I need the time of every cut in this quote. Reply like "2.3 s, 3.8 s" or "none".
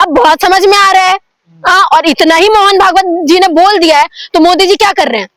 none